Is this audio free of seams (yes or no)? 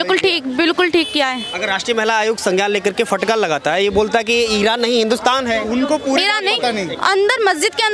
yes